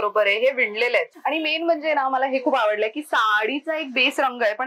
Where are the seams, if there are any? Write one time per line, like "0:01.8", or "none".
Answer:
0:01.1

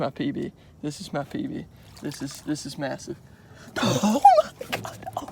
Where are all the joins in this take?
none

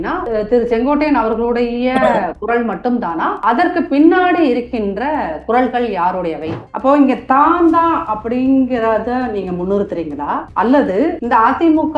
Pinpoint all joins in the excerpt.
0:06.5

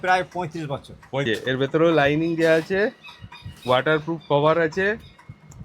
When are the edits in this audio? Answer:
0:01.2

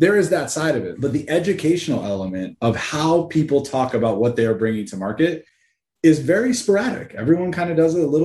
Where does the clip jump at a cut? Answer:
0:00.9

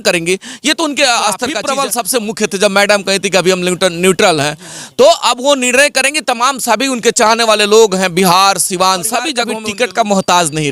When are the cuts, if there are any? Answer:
0:01.6
0:09.4

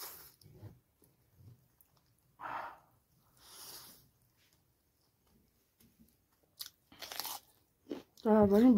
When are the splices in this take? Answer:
0:06.5

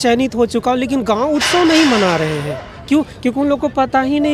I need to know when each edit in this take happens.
none

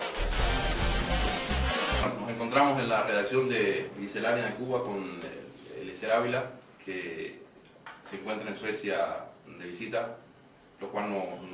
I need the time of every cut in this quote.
0:08.0

